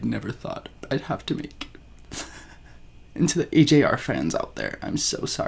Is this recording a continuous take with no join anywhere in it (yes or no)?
yes